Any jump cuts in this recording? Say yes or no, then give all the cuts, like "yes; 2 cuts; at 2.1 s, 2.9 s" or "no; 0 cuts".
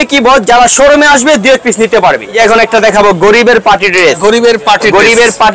yes; 1 cut; at 2.3 s